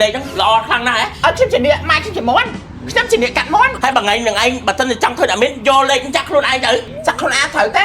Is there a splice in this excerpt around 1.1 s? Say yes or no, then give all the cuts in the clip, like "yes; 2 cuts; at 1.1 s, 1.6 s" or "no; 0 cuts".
yes; 3 cuts; at 1.1 s, 3.7 s, 6.9 s